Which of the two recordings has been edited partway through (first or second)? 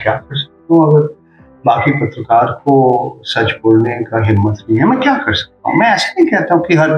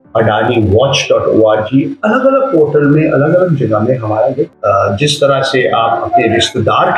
second